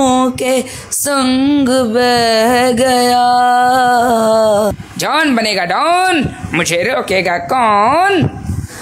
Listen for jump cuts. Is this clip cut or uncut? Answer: cut